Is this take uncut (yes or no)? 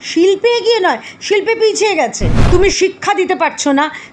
no